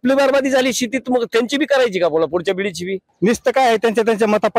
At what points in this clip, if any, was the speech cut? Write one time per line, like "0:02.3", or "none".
0:03.0